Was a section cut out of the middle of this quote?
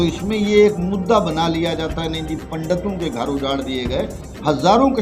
no; 0 cuts

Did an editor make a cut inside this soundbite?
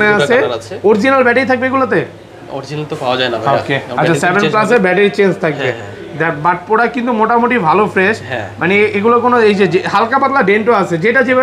no; 0 cuts

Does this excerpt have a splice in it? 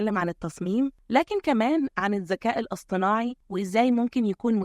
yes; 2 cuts; at 1.0 s, 3.4 s

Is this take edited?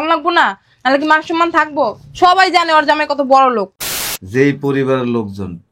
yes; 1 cut; at 3.8 s

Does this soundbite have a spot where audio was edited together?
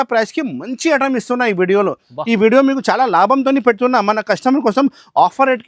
no; 0 cuts

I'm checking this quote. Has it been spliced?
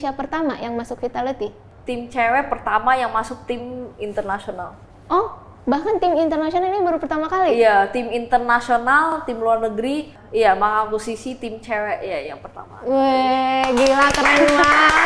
yes; 2 cuts; at 1.7 s, 10.2 s

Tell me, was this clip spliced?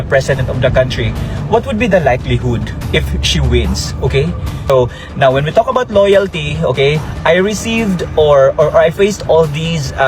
yes; 1 cut; at 4.7 s

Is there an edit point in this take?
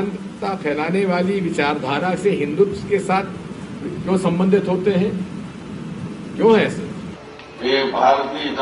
yes; 1 cut; at 6.9 s

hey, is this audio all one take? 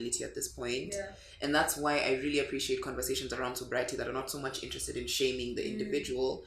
yes; 0 cuts

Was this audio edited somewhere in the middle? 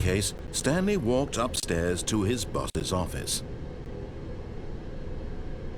no; 0 cuts

